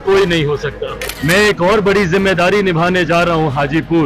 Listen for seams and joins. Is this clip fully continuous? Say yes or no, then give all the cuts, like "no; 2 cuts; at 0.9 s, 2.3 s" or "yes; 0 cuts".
no; 1 cut; at 1.0 s